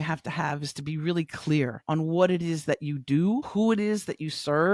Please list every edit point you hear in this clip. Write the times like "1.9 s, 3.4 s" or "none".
1.8 s